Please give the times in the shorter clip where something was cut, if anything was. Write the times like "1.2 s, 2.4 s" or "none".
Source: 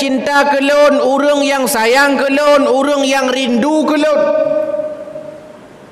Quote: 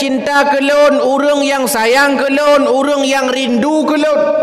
none